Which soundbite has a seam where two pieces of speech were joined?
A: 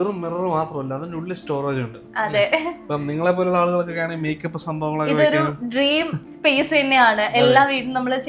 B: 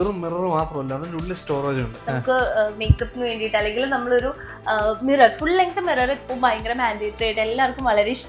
B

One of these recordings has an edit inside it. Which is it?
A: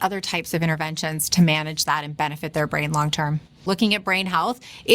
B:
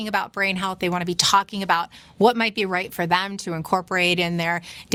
A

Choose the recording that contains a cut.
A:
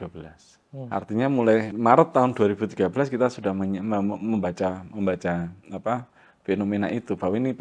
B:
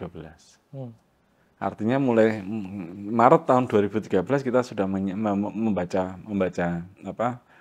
A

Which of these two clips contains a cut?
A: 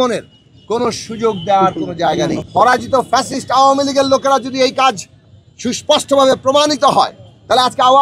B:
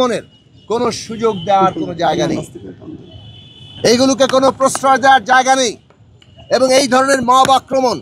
A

